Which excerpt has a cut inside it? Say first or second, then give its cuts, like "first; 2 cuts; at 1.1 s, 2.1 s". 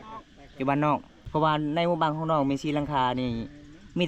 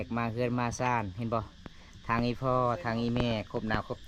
first; 1 cut; at 1.2 s